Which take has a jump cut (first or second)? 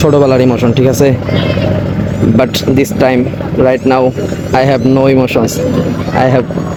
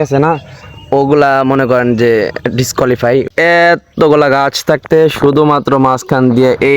second